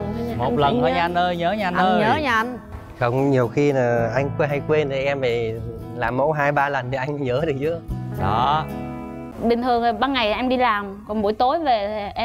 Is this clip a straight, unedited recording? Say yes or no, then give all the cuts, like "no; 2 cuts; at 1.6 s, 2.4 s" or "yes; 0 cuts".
no; 1 cut; at 9.2 s